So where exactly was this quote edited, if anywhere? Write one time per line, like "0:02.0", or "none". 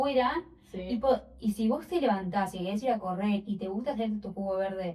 none